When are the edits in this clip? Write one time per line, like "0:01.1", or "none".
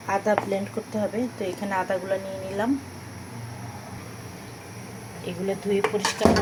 none